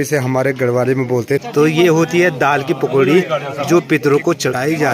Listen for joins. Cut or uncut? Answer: cut